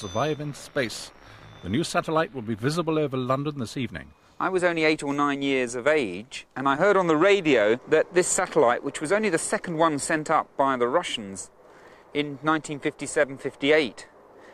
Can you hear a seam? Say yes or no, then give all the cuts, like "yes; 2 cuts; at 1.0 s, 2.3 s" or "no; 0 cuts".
no; 0 cuts